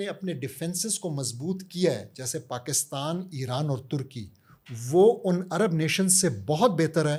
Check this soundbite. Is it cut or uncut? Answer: uncut